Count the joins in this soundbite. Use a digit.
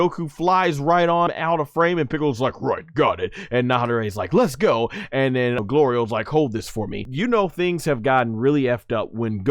3